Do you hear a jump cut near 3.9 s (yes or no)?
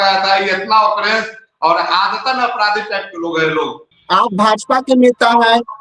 yes